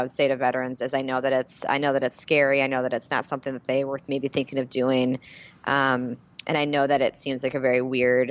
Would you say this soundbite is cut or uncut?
uncut